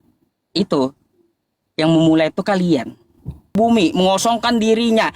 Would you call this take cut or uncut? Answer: cut